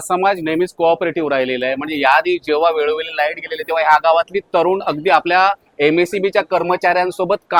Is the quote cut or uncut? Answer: uncut